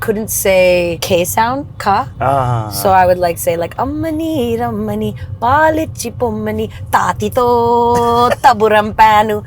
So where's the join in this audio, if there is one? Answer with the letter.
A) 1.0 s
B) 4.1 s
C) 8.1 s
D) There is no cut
A